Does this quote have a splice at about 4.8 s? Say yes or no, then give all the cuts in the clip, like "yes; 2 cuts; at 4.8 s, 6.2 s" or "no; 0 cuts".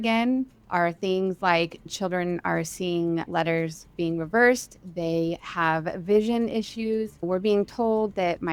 no; 3 cuts; at 1.9 s, 3.3 s, 7.2 s